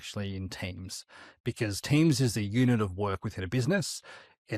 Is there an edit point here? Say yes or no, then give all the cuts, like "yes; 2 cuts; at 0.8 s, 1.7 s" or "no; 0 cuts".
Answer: no; 0 cuts